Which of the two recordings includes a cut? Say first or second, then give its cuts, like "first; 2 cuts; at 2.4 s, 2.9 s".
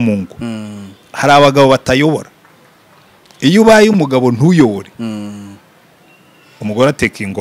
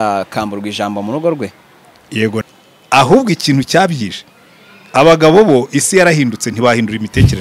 second; 1 cut; at 2.4 s